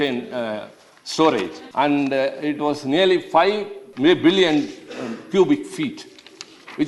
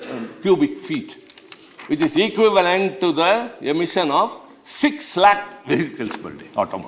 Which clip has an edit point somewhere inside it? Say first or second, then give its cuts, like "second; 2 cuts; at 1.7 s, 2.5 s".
first; 2 cuts; at 1.6 s, 3.8 s